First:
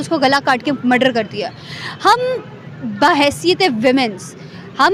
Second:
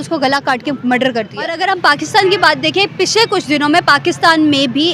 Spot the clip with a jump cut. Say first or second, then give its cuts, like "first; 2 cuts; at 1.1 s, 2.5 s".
second; 1 cut; at 1.6 s